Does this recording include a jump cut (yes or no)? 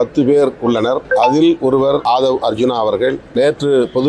yes